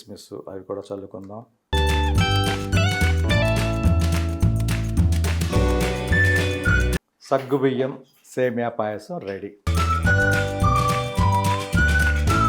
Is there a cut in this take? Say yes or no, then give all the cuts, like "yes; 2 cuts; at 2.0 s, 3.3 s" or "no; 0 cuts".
no; 0 cuts